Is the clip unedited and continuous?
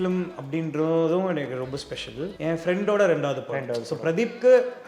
no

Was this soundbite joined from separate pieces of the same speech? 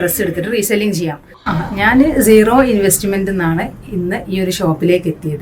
yes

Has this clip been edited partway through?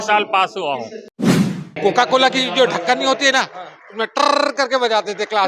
yes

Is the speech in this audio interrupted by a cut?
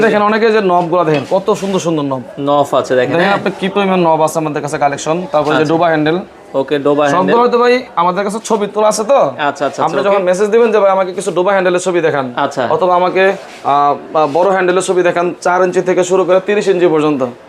no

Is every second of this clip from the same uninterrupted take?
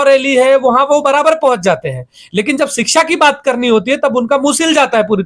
yes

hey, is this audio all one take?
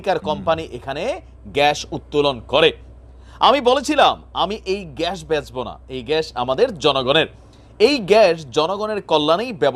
yes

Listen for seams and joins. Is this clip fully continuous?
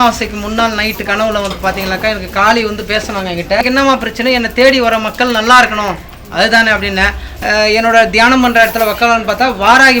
no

